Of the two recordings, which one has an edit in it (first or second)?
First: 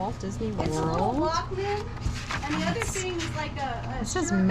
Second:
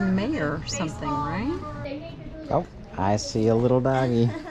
second